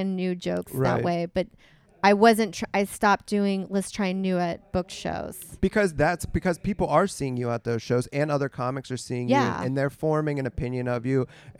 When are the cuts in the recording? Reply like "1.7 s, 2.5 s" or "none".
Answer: 5.4 s

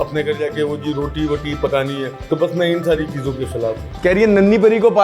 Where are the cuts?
2.1 s

